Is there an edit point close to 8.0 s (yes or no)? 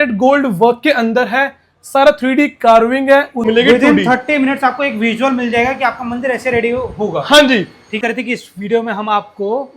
yes